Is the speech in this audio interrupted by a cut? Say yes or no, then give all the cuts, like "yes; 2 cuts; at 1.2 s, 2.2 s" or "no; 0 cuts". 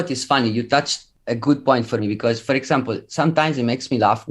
yes; 1 cut; at 1.0 s